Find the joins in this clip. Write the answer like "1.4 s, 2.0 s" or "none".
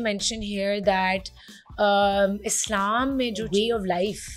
3.5 s